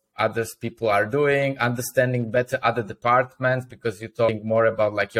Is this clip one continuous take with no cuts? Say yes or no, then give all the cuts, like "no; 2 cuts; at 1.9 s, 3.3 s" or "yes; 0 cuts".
no; 1 cut; at 4.3 s